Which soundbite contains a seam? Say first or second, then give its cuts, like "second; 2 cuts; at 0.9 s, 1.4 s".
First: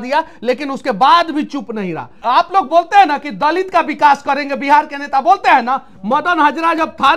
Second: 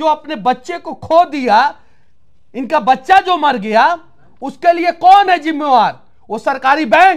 first; 1 cut; at 2.2 s